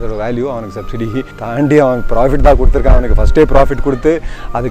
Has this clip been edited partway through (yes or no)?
yes